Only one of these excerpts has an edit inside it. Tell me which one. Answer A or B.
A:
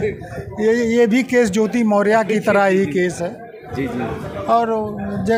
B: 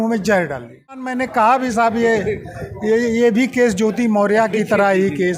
B